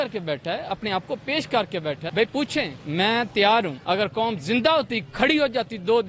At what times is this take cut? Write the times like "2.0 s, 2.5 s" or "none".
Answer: 2.0 s, 2.8 s, 3.8 s